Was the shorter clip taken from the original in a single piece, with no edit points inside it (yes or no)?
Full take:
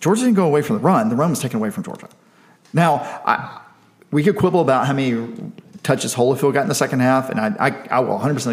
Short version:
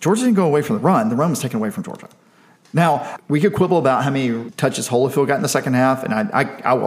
no